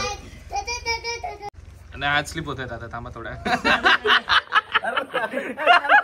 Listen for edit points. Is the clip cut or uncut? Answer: cut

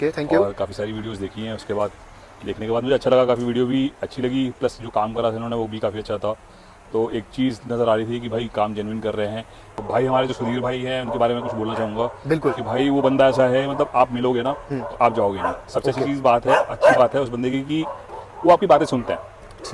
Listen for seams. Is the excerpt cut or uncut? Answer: cut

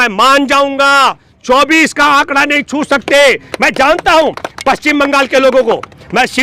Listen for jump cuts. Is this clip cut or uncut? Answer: uncut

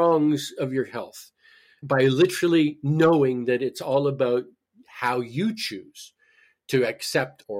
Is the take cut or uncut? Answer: uncut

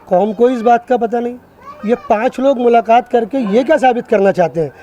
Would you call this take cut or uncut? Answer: uncut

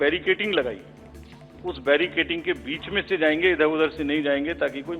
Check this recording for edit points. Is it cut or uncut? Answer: uncut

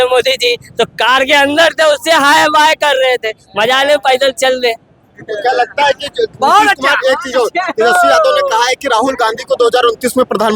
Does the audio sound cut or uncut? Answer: uncut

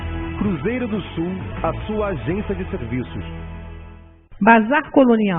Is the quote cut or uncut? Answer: cut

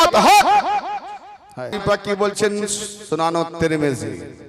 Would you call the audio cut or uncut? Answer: cut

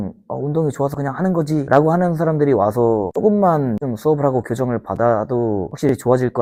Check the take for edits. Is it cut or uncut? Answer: uncut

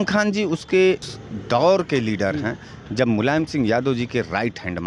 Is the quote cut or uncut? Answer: cut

